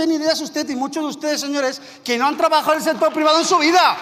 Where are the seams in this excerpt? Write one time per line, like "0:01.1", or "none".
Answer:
none